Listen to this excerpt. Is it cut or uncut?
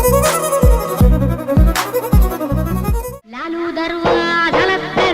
uncut